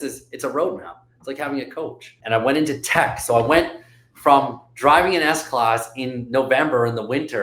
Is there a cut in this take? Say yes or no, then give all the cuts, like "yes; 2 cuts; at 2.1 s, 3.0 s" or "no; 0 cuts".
yes; 1 cut; at 2.1 s